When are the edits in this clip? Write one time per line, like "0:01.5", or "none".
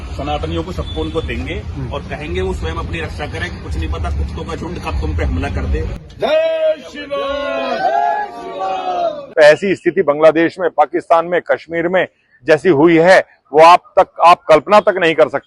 0:06.0
0:09.2